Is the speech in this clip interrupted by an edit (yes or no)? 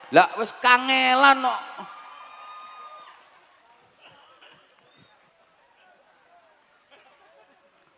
no